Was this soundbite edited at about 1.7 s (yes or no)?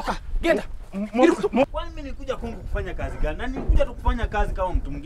yes